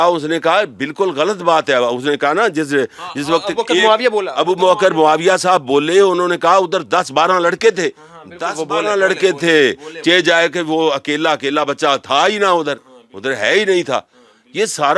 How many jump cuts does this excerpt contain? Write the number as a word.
zero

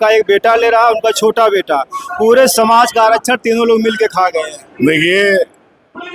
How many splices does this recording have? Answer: one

